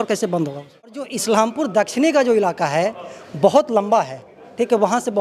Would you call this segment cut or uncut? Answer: cut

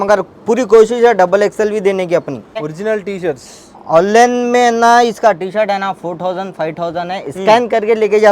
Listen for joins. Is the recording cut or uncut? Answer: cut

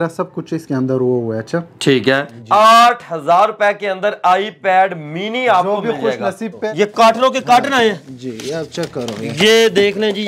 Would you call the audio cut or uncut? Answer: cut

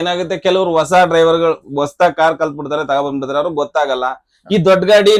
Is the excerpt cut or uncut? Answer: uncut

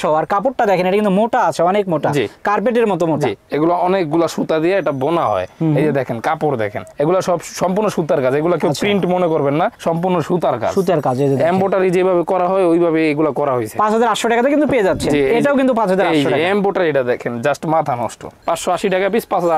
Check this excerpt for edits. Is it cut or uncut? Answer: uncut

